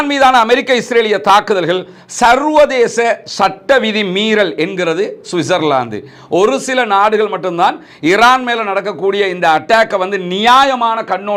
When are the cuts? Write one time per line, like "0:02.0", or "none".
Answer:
none